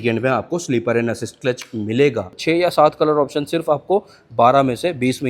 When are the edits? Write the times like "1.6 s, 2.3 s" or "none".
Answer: 2.3 s